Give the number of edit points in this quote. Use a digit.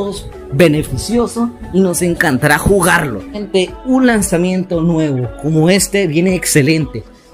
1